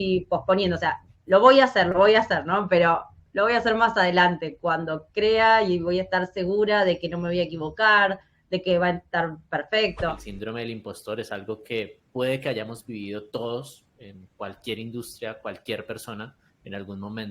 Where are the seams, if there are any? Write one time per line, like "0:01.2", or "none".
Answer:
0:10.3